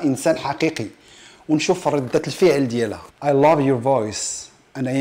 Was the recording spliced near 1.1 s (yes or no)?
no